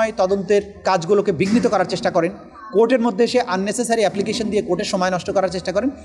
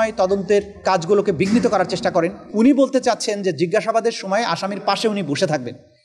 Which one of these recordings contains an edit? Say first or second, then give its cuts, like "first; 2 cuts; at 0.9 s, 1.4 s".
second; 1 cut; at 2.5 s